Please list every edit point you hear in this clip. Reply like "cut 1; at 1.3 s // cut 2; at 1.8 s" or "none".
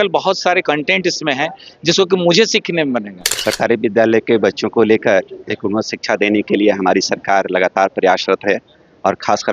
cut 1; at 3.3 s

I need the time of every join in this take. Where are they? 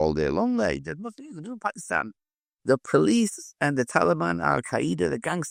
none

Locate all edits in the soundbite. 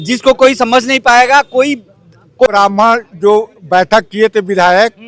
cut 1; at 2.5 s

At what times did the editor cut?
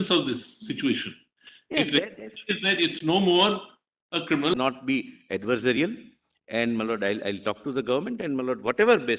cut 1; at 4.5 s

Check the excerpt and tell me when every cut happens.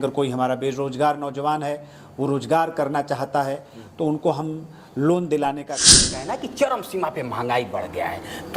cut 1; at 6.1 s

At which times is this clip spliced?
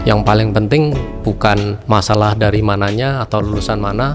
cut 1; at 1.8 s

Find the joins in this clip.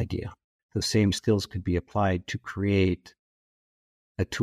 cut 1; at 1.0 s

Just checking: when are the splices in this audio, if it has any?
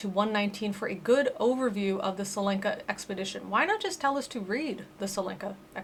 none

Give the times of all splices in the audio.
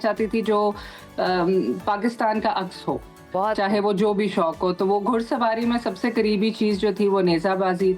none

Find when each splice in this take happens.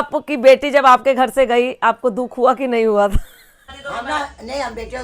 cut 1; at 3.7 s

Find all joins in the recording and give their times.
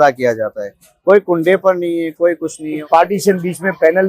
cut 1; at 2.8 s

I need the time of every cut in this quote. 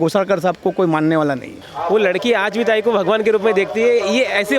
cut 1; at 1.7 s

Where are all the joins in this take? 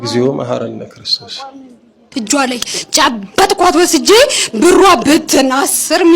cut 1; at 2.1 s

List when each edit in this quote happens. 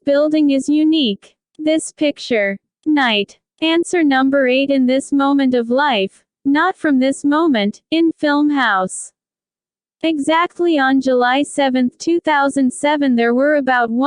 cut 1; at 0.9 s

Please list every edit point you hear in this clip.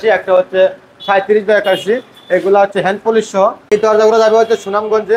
cut 1; at 3.6 s

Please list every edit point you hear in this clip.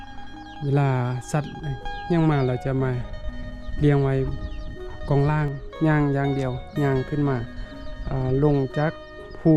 cut 1; at 5.6 s

